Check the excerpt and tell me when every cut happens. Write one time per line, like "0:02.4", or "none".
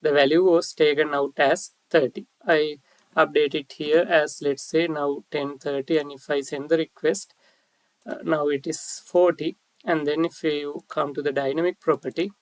0:02.3